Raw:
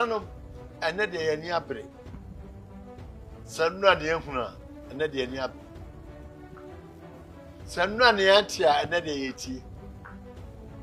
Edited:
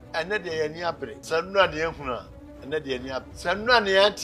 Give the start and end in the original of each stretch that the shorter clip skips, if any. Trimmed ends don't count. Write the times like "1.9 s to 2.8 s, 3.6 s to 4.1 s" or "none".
1.9 s to 3.5 s, 5.6 s to 7.6 s